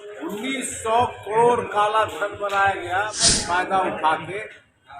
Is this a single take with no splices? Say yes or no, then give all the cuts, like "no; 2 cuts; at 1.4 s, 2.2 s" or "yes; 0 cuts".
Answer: no; 1 cut; at 3.4 s